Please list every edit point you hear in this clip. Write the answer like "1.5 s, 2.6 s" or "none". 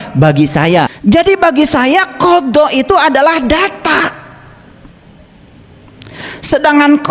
1.0 s